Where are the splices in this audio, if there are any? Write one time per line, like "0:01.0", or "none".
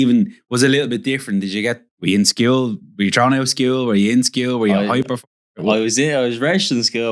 0:01.9